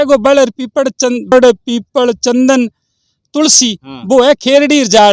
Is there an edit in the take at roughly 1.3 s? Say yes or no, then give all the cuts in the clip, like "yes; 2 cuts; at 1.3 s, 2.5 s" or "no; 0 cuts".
yes; 1 cut; at 1.3 s